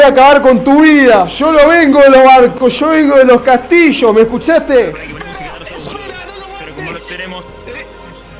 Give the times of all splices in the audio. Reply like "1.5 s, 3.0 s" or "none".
1.4 s, 5.0 s